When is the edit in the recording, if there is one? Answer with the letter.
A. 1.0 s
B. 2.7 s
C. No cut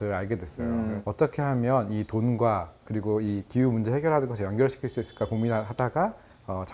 A